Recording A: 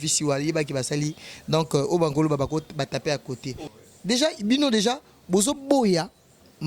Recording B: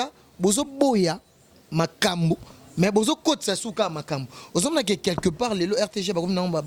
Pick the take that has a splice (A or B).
A